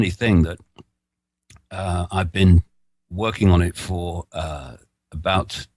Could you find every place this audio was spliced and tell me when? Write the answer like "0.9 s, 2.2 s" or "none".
none